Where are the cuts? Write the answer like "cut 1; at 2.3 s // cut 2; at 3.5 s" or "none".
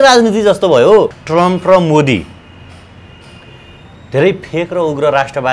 cut 1; at 1.2 s